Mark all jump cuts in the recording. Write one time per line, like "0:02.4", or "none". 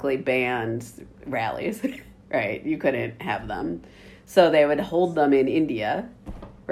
none

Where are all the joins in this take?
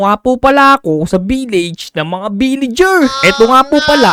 none

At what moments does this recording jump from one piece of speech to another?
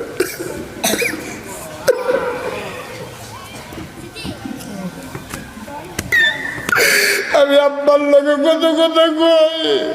none

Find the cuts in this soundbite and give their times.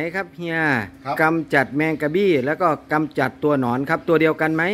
none

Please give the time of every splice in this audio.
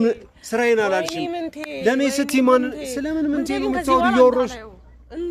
none

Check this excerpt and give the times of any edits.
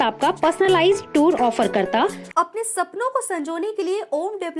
0:02.2

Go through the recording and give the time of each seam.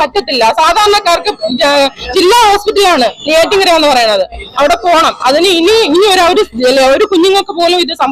none

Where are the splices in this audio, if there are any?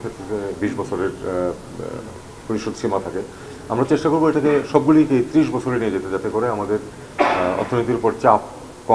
none

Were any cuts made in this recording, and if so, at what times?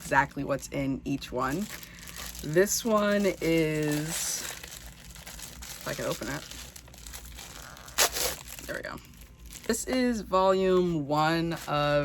0:09.7

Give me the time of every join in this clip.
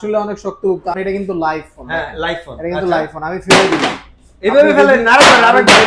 0:01.0

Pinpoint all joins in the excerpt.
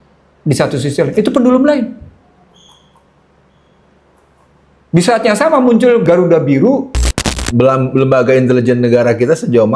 0:07.1

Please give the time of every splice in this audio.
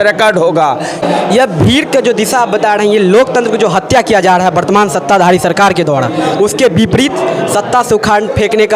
none

